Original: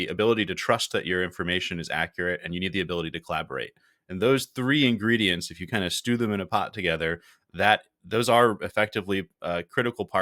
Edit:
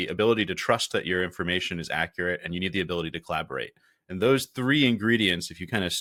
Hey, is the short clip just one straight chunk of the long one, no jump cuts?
yes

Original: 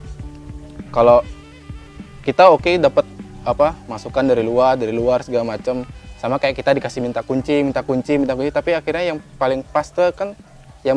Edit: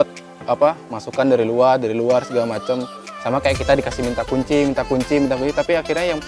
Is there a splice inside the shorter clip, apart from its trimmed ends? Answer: no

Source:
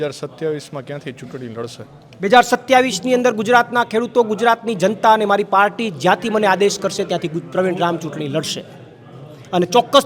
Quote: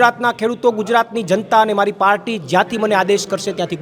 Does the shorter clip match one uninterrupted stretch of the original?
yes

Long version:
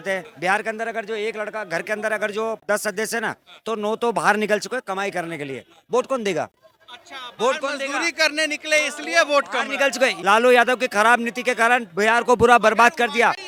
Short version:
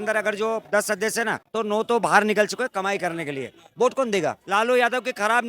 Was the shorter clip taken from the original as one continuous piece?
no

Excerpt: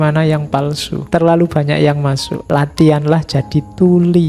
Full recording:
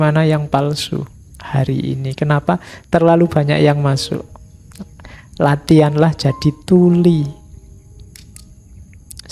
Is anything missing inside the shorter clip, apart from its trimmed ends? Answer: yes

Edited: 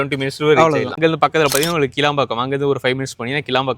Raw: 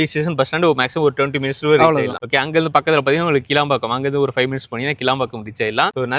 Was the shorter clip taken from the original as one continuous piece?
no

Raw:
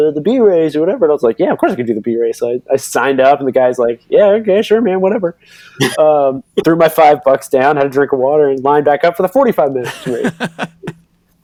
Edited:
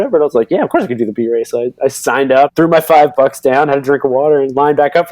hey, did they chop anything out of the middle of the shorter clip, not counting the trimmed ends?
yes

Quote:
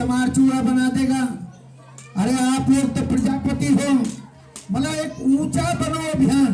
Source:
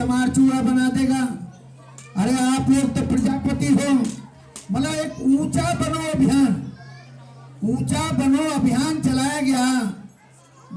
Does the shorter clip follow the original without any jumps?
yes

